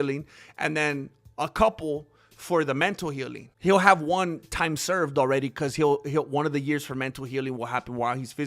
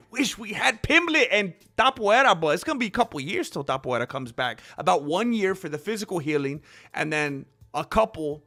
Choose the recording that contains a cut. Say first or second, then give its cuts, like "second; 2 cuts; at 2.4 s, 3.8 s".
first; 1 cut; at 3.4 s